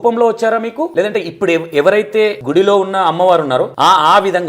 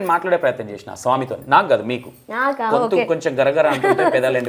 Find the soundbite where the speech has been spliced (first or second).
first